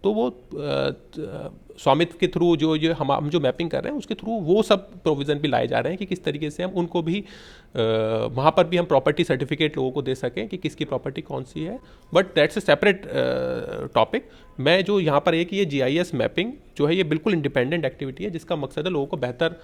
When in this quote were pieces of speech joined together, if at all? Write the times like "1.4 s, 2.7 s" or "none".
none